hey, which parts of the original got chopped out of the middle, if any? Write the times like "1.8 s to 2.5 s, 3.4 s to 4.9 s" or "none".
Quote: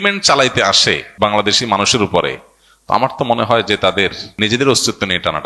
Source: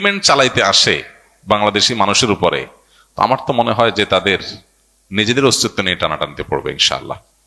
1.1 s to 1.3 s, 4.5 s to 5.0 s